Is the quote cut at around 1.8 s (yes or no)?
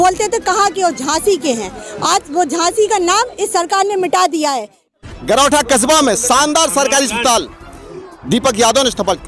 no